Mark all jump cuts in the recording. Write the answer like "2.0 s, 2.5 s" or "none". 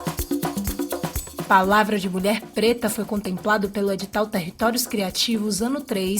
1.5 s